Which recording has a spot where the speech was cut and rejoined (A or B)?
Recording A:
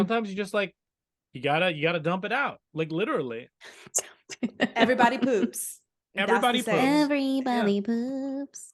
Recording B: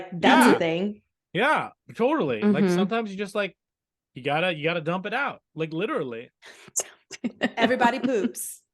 B